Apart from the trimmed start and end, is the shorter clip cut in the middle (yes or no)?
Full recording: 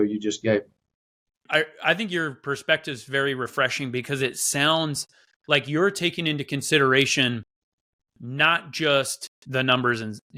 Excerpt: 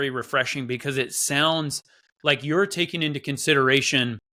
no